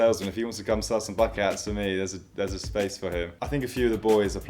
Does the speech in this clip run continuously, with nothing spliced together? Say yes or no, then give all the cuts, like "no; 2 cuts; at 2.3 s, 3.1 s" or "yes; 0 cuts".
no; 1 cut; at 3.4 s